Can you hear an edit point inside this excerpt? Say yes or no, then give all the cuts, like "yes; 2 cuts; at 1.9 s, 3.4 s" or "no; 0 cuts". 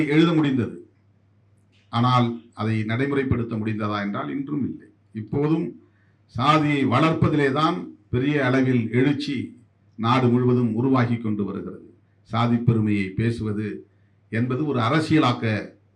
no; 0 cuts